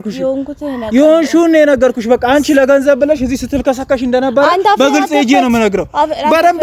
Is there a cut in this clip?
no; 0 cuts

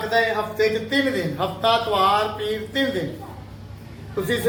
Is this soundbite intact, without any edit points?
yes; 0 cuts

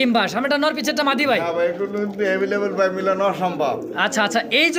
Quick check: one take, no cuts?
yes; 0 cuts

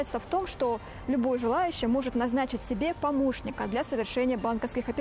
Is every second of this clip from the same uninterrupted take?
yes; 0 cuts

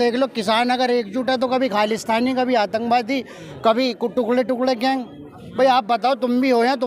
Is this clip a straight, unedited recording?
yes; 0 cuts

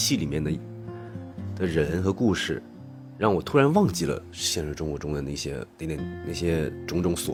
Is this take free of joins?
yes; 0 cuts

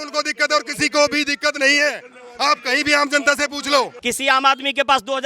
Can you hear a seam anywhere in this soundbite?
yes; 1 cut; at 3.9 s

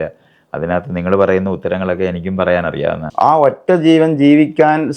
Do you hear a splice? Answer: yes; 1 cut; at 3.0 s

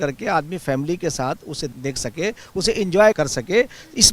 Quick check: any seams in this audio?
yes; 2 cuts; at 1.7 s, 3.2 s

